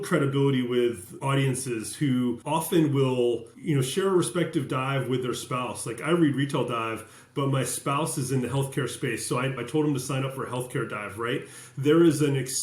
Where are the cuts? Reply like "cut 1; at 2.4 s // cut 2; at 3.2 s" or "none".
cut 1; at 1.1 s // cut 2; at 2.4 s // cut 3; at 3.5 s // cut 4; at 9.6 s